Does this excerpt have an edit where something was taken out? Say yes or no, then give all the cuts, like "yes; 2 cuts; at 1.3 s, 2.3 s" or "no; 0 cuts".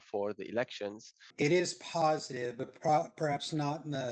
yes; 1 cut; at 1.2 s